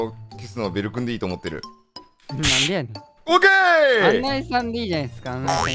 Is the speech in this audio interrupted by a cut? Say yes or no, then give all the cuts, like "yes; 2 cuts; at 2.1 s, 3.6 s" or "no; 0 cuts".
no; 0 cuts